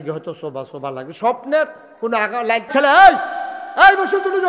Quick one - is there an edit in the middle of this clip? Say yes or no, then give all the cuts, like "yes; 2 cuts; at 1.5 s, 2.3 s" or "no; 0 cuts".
yes; 1 cut; at 2.7 s